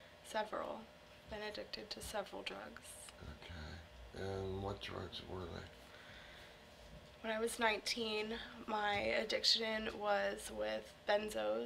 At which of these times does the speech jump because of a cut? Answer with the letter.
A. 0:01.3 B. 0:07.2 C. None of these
C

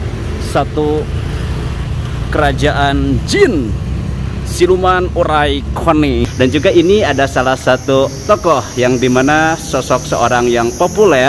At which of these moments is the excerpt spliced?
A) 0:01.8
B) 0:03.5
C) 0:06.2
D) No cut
C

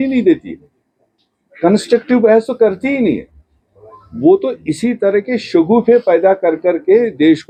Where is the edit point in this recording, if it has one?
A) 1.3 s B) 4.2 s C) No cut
C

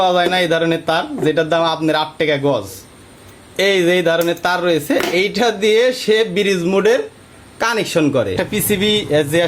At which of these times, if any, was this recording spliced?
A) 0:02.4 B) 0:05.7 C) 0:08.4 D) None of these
C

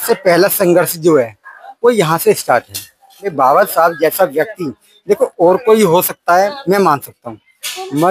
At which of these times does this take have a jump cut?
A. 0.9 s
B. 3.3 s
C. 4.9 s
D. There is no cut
B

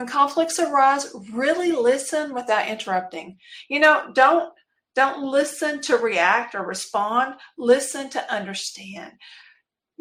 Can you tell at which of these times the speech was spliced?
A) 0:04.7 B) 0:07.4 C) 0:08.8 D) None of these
D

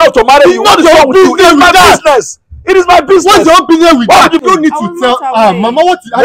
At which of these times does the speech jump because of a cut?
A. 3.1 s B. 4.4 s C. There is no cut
B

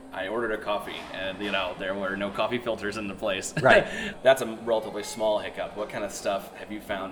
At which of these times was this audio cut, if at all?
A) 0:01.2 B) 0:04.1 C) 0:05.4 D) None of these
B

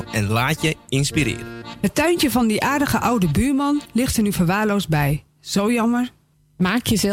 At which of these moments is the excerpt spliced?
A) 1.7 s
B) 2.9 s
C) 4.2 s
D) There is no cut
A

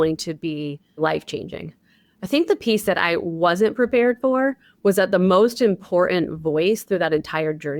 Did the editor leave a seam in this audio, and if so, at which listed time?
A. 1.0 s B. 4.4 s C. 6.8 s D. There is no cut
A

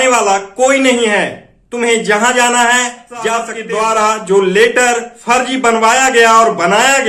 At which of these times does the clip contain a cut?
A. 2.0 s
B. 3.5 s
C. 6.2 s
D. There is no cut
B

